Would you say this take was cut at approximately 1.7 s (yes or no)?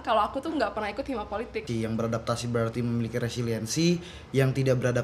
yes